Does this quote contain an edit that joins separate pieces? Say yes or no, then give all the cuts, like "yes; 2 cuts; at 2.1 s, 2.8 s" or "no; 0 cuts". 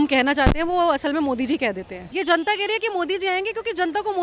yes; 1 cut; at 2.0 s